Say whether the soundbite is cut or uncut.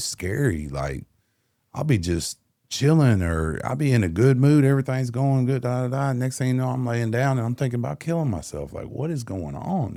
uncut